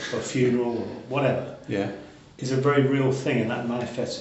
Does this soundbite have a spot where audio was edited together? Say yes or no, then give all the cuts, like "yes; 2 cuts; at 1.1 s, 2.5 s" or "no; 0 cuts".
no; 0 cuts